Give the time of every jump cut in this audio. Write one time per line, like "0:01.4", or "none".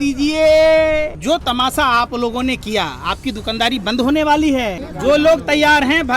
0:01.2
0:04.8